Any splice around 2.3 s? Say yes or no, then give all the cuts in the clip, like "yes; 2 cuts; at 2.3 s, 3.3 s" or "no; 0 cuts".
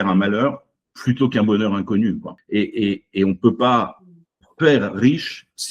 yes; 1 cut; at 2.3 s